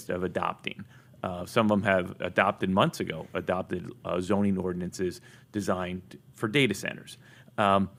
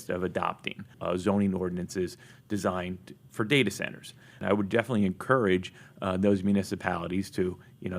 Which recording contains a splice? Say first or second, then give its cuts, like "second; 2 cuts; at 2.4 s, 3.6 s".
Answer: second; 2 cuts; at 0.9 s, 4.4 s